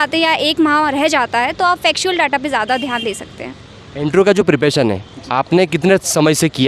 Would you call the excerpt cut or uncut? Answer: uncut